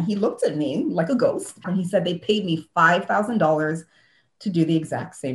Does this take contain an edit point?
yes; 1 cut; at 1.6 s

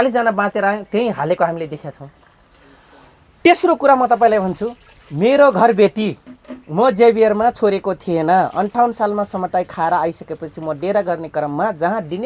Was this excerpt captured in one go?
yes; 0 cuts

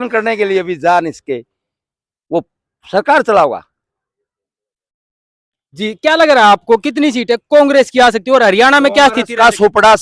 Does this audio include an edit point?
no; 0 cuts

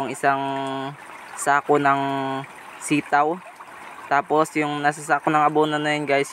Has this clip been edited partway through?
no; 0 cuts

